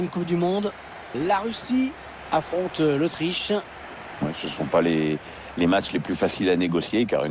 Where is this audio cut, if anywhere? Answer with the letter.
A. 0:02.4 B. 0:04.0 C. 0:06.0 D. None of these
D